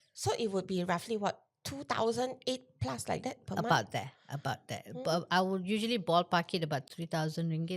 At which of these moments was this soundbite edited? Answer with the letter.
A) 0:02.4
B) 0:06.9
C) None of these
B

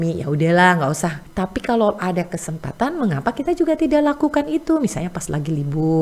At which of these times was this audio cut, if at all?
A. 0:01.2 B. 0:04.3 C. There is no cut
A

